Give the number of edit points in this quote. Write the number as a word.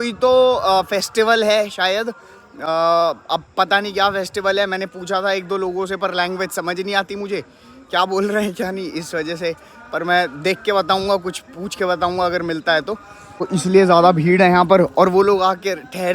zero